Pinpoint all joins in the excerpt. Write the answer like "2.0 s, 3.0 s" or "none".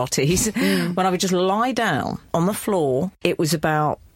2.3 s, 3.1 s